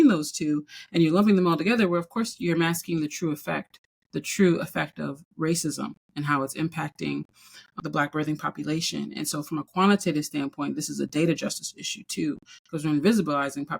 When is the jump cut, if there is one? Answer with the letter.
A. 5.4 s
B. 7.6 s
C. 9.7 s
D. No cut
B